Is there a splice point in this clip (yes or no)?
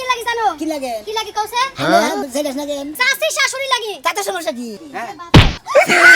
yes